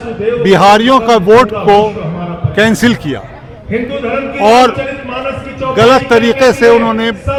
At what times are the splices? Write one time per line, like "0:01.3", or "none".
none